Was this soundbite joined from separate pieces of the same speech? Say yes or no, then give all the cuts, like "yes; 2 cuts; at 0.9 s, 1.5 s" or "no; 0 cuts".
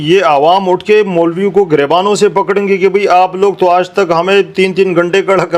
no; 0 cuts